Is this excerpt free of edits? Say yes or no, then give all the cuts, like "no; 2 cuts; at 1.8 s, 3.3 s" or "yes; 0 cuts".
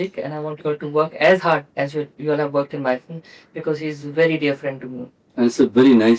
yes; 0 cuts